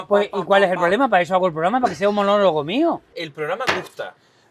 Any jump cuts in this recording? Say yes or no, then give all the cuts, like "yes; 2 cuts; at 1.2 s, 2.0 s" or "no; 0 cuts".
yes; 1 cut; at 3.2 s